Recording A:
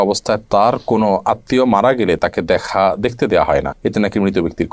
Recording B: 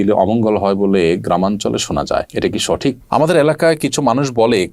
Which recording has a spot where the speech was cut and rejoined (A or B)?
B